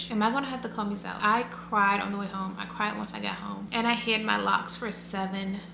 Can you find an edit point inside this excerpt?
yes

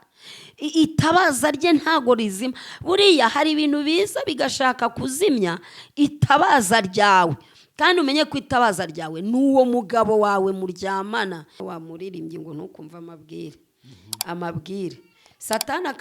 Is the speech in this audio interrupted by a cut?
yes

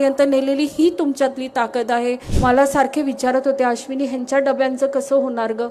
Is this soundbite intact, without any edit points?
no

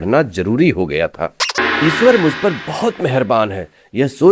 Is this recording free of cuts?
no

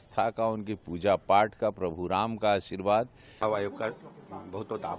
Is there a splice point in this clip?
yes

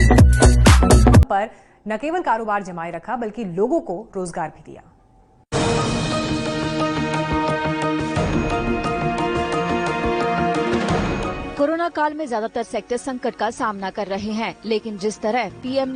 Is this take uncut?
no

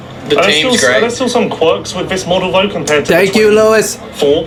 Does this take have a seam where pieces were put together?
no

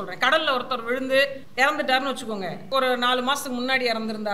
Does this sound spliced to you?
yes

